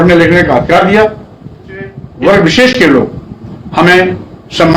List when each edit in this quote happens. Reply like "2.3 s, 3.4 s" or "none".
2.0 s